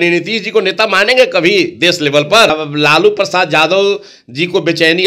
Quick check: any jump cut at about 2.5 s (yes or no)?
yes